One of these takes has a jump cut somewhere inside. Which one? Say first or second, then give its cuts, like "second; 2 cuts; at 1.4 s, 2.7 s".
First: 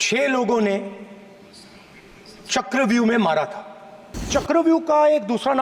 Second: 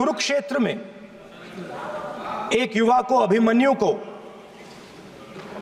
first; 1 cut; at 4.3 s